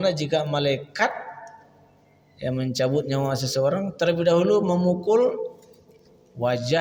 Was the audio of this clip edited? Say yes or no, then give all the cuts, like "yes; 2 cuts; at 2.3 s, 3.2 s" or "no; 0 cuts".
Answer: no; 0 cuts